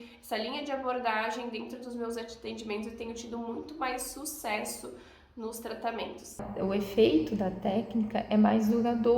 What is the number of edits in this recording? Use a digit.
1